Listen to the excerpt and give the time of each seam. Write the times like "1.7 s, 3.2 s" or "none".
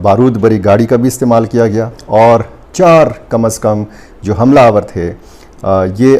1.9 s